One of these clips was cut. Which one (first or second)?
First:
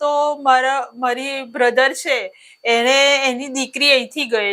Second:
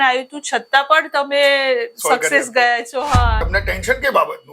second